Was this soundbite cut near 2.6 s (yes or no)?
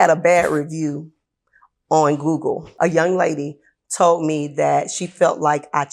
yes